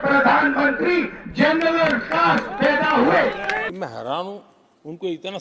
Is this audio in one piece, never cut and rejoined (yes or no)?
no